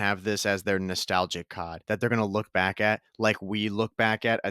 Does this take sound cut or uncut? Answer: cut